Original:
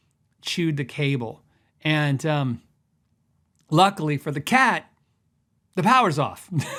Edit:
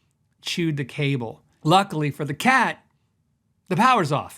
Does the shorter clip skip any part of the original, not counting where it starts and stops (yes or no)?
yes